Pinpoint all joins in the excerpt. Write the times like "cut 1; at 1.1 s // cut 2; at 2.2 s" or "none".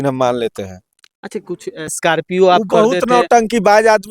cut 1; at 2.0 s